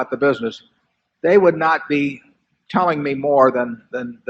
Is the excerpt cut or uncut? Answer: uncut